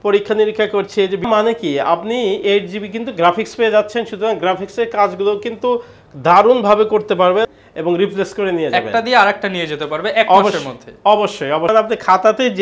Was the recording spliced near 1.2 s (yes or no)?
yes